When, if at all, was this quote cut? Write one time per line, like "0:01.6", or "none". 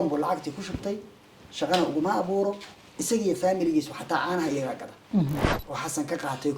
0:05.6